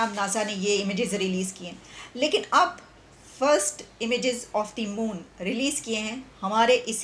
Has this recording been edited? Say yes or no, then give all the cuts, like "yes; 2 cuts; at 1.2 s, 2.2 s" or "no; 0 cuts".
no; 0 cuts